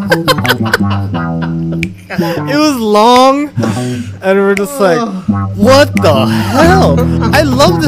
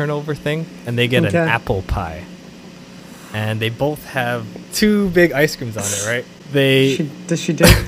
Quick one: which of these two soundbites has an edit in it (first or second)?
second